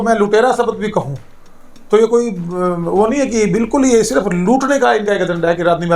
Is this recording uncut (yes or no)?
yes